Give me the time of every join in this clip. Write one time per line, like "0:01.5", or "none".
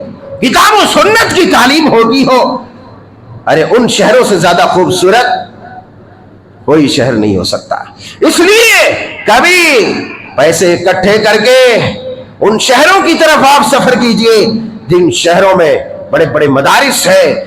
none